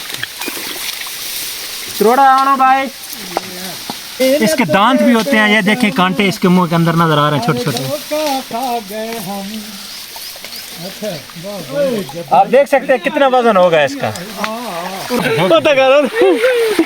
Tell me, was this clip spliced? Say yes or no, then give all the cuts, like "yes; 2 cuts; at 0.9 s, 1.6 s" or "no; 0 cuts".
yes; 2 cuts; at 4.2 s, 15.2 s